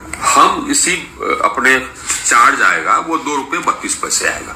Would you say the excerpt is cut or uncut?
cut